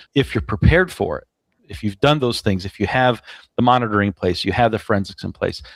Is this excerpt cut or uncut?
uncut